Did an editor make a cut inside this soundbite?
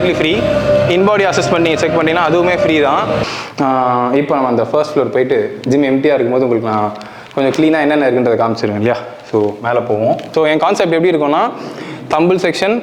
yes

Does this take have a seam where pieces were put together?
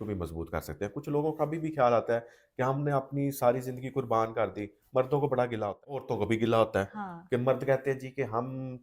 yes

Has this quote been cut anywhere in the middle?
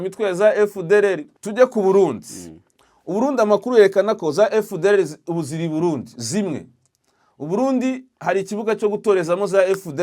yes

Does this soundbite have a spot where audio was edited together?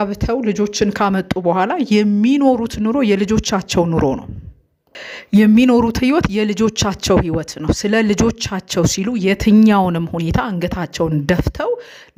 no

